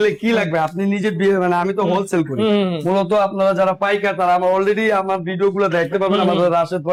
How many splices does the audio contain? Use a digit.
0